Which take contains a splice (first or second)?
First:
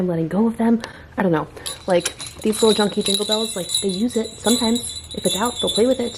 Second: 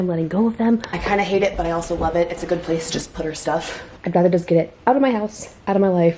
second